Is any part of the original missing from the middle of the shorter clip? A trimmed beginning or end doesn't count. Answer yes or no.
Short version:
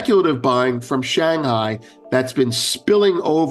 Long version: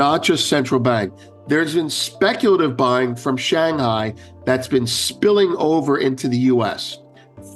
no